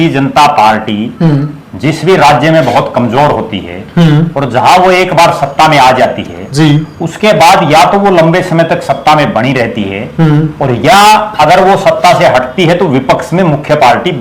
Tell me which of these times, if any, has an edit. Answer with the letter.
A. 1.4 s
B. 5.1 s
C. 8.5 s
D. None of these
D